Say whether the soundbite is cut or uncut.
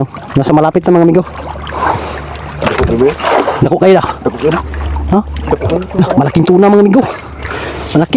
uncut